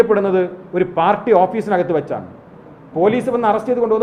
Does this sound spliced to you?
no; 0 cuts

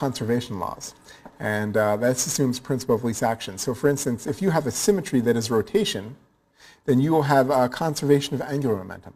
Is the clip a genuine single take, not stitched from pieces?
yes; 0 cuts

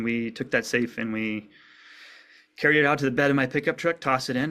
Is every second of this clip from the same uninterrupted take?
yes; 0 cuts

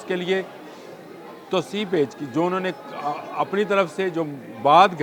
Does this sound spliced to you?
no; 0 cuts

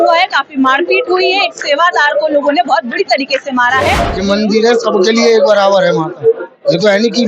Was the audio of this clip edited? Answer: yes; 1 cut; at 4.1 s

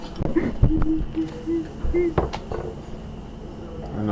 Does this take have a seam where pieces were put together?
no; 0 cuts

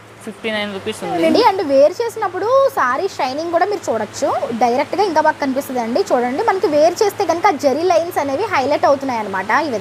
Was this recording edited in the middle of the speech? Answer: yes; 2 cuts; at 1.3 s, 4.5 s

